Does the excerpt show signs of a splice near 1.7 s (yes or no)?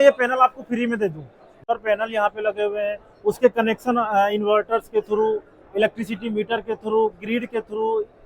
yes